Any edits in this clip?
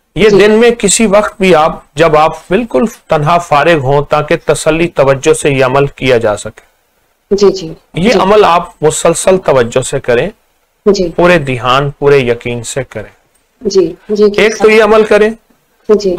no; 0 cuts

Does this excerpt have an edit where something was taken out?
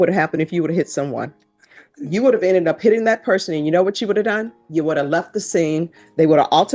no; 0 cuts

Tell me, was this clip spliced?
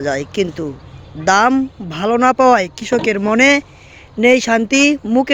no; 0 cuts

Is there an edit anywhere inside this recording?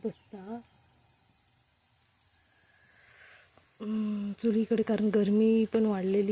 no; 0 cuts

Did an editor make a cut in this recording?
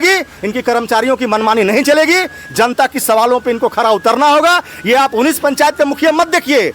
no; 0 cuts

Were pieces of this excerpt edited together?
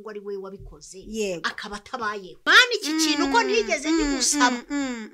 yes; 1 cut; at 2.5 s

